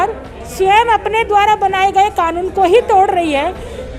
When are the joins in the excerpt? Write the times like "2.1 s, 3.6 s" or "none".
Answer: none